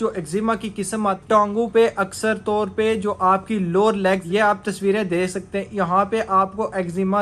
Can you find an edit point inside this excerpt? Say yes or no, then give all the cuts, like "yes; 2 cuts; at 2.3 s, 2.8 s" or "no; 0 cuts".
yes; 2 cuts; at 1.2 s, 4.2 s